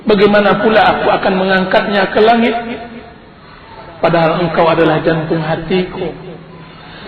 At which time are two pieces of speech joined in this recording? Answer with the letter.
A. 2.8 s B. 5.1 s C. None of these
B